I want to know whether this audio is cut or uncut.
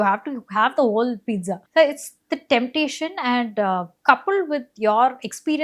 cut